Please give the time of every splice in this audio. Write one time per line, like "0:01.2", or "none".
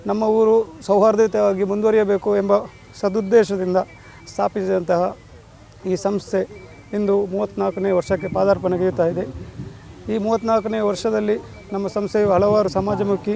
none